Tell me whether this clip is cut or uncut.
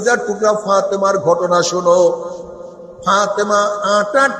uncut